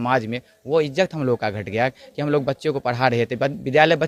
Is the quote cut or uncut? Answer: uncut